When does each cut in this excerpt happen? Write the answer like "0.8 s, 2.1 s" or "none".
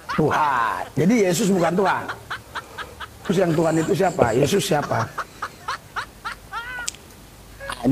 none